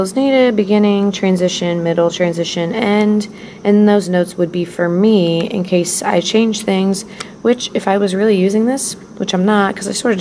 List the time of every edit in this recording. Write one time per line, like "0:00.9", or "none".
none